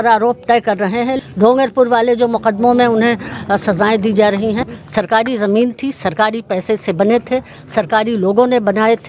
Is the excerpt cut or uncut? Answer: cut